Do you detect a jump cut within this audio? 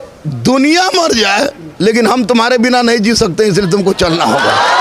no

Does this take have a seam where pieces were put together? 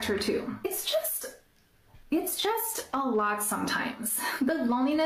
no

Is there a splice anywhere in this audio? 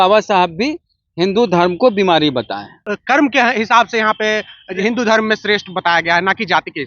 yes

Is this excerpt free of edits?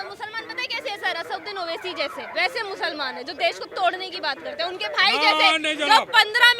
yes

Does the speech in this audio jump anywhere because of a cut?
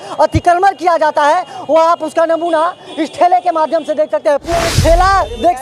yes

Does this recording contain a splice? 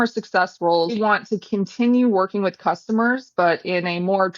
yes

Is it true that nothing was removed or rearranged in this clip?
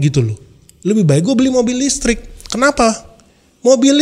yes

